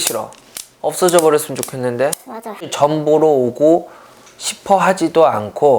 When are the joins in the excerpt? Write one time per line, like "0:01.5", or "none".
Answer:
0:02.7